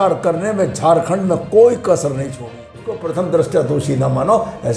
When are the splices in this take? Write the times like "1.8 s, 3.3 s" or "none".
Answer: 3.0 s